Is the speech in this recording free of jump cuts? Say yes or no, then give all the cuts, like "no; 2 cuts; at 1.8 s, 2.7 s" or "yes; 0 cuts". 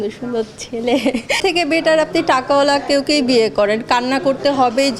no; 1 cut; at 1.4 s